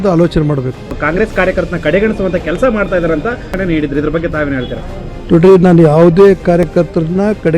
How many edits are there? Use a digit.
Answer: 2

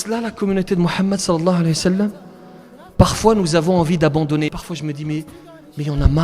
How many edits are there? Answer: 1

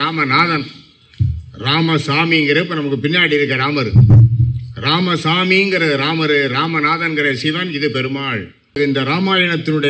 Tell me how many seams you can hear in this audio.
1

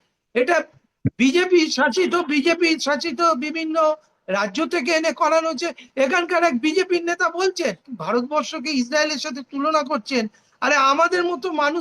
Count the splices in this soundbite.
1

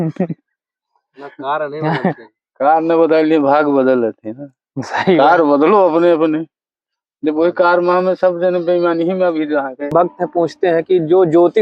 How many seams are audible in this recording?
1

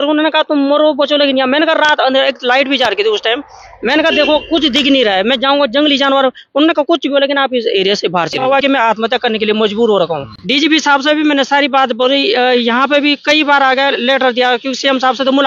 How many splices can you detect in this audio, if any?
2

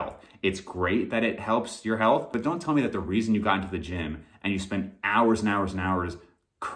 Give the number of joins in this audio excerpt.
1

